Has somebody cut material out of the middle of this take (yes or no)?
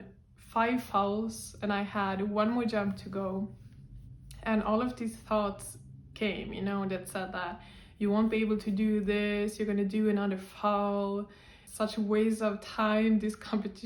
no